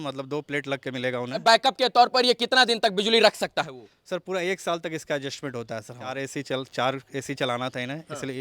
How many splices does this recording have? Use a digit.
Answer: 2